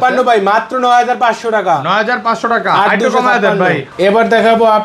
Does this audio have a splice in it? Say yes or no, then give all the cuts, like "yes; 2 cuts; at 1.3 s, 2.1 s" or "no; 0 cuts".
yes; 1 cut; at 3.9 s